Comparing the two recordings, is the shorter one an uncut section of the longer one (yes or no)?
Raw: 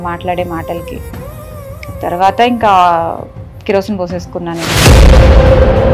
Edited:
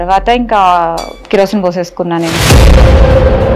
no